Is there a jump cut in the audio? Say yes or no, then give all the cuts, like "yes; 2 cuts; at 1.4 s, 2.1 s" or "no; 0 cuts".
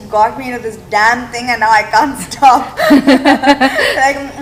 no; 0 cuts